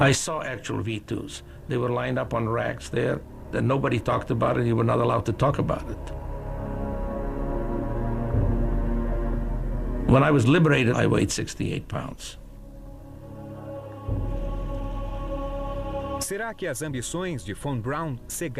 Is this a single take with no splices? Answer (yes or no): no